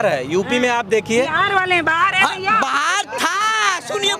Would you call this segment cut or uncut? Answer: uncut